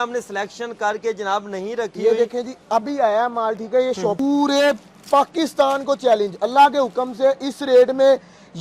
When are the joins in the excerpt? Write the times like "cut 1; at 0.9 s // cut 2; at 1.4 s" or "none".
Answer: cut 1; at 4.2 s